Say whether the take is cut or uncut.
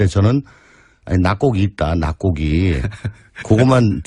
cut